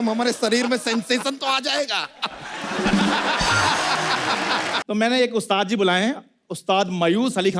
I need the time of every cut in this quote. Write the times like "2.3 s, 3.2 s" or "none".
4.8 s